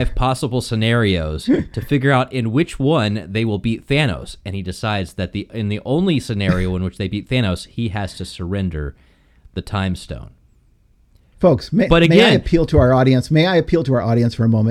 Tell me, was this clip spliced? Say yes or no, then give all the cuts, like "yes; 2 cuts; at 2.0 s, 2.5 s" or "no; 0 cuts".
no; 0 cuts